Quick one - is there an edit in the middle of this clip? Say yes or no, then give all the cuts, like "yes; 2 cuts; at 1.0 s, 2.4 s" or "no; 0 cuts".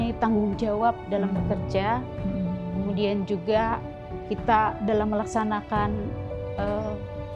no; 0 cuts